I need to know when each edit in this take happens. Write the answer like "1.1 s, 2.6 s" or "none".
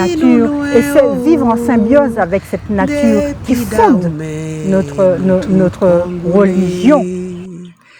7.0 s

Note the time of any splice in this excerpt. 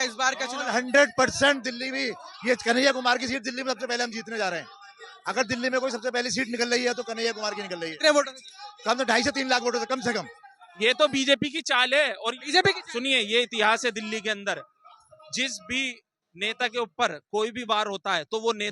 10.6 s

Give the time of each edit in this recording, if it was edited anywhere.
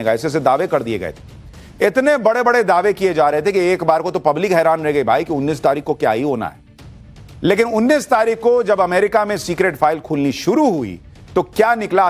3.5 s

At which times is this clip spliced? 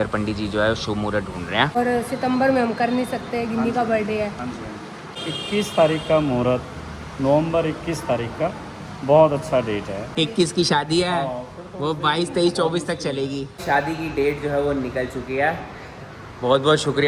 1.8 s, 5.1 s, 10.0 s, 13.6 s

